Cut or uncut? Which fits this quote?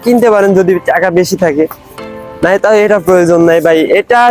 uncut